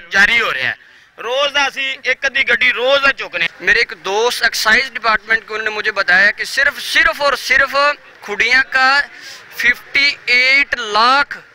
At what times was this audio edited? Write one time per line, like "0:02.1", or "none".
0:03.5